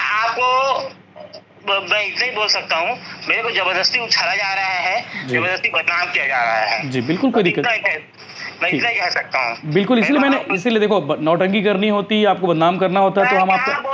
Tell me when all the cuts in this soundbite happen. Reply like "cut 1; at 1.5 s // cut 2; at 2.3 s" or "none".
none